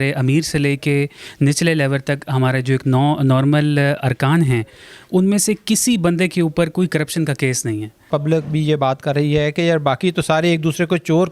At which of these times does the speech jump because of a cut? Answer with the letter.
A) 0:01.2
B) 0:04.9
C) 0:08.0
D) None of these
C